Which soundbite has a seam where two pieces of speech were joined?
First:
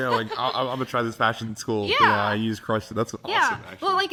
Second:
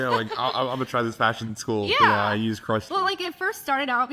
second; 1 cut; at 2.9 s

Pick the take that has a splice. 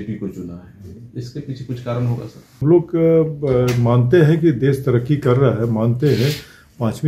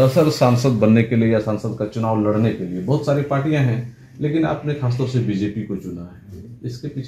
first; 1 cut; at 2.6 s

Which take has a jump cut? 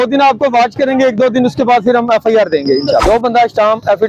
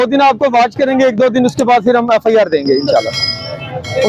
first; 1 cut; at 3.0 s

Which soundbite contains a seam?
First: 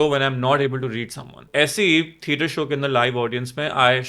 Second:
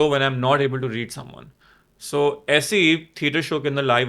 first; 1 cut; at 1.5 s

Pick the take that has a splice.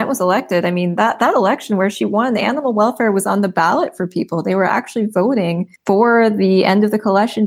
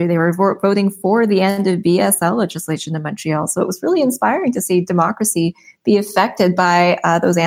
first; 1 cut; at 5.7 s

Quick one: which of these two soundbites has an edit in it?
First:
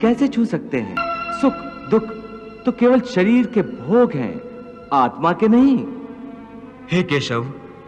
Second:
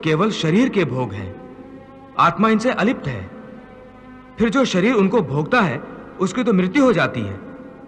first; 1 cut; at 1.0 s

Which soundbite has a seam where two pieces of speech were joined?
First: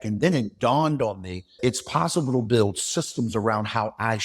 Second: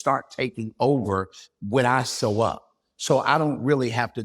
first; 1 cut; at 1.6 s

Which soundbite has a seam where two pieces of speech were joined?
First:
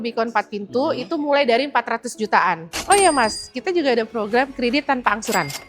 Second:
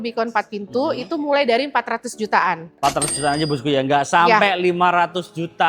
first; 1 cut; at 2.7 s

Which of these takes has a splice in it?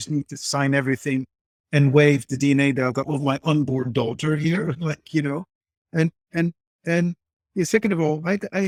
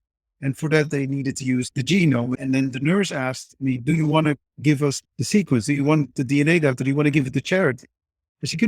second; 3 cuts; at 1.7 s, 2.3 s, 5.0 s

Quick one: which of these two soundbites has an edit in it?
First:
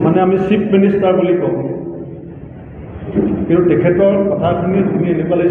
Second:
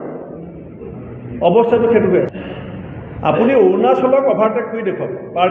second; 1 cut; at 2.4 s

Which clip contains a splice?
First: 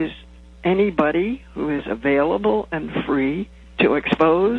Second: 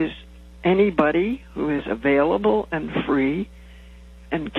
first; 1 cut; at 3.6 s

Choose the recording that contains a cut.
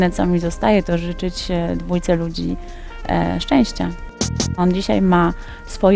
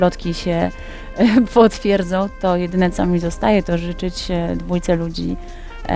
first; 1 cut; at 4.2 s

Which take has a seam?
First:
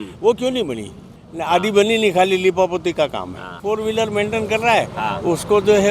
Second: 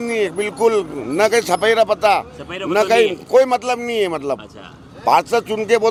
first; 2 cuts; at 1.1 s, 3.6 s

